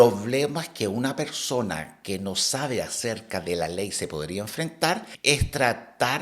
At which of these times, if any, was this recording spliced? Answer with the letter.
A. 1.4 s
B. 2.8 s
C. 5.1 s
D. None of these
C